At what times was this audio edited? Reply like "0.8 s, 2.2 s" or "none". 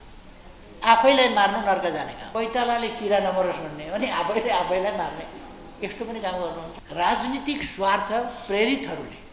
2.2 s, 6.8 s